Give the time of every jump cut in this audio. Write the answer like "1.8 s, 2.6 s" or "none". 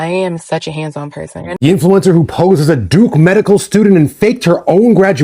1.4 s